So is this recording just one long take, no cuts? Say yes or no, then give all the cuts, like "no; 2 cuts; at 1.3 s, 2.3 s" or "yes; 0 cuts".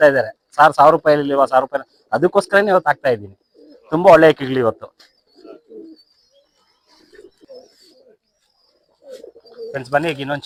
yes; 0 cuts